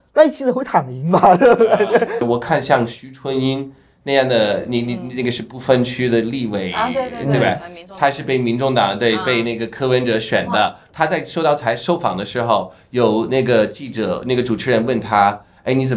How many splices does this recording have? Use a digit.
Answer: 1